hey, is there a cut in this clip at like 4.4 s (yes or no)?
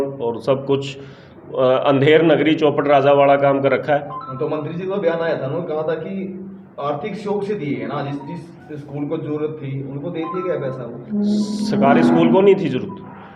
no